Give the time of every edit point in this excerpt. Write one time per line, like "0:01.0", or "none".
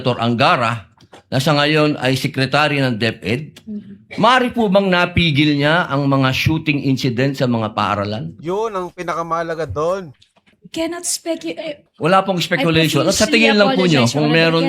0:10.6
0:11.9